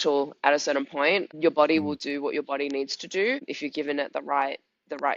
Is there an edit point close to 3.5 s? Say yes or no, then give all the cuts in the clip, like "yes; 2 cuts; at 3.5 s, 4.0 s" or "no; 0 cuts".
yes; 2 cuts; at 1.3 s, 3.5 s